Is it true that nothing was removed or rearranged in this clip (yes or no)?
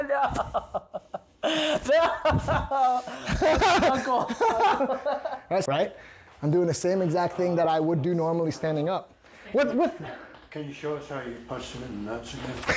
no